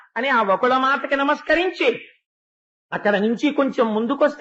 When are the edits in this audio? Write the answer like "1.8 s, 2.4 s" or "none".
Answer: none

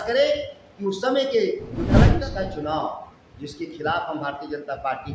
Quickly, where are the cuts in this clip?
2.1 s

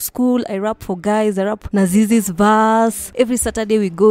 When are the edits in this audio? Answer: 1.6 s, 3.0 s

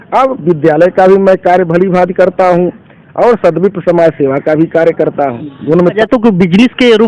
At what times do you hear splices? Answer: 6.0 s

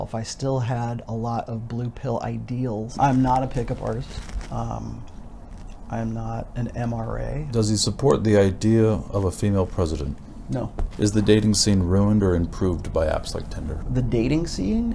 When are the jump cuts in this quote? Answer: 2.9 s, 7.5 s, 10.8 s, 13.9 s

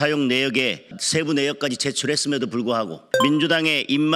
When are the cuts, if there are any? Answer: 1.0 s, 3.0 s

